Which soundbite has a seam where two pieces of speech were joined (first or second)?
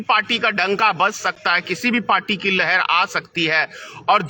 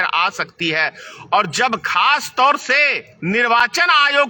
second